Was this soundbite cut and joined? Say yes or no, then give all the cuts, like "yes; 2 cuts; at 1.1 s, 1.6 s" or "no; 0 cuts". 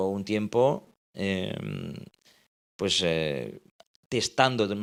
no; 0 cuts